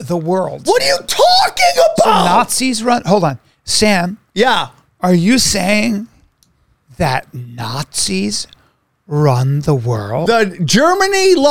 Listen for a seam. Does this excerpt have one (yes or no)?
yes